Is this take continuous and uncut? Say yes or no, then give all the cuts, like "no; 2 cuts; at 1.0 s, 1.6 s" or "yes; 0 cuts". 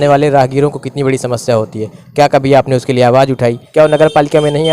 no; 1 cut; at 3.6 s